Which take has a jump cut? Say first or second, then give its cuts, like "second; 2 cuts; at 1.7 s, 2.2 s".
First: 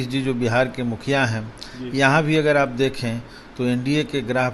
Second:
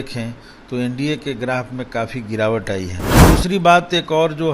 second; 1 cut; at 3.1 s